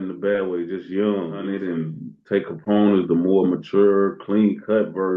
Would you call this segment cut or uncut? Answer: cut